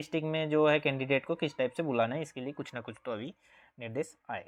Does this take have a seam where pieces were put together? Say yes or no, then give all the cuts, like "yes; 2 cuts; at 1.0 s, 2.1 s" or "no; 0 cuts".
no; 0 cuts